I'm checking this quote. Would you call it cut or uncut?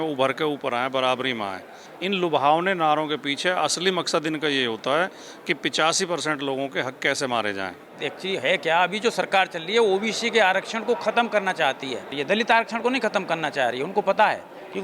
cut